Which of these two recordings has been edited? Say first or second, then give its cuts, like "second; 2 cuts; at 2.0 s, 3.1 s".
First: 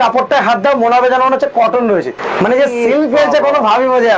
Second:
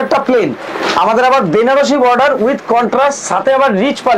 first; 1 cut; at 2.2 s